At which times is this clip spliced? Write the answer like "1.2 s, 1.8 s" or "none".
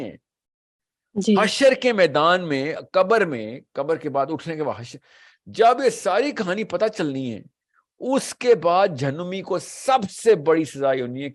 none